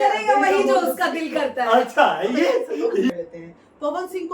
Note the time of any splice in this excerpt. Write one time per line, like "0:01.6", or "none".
0:03.1